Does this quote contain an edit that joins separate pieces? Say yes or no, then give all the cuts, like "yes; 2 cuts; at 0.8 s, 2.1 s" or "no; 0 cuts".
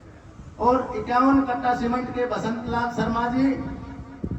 no; 0 cuts